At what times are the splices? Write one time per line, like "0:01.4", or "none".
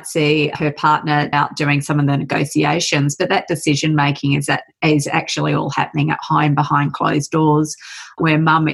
0:01.3